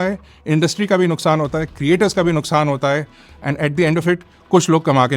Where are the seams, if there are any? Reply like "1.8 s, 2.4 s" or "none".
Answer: none